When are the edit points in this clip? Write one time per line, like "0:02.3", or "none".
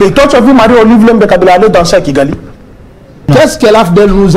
0:03.3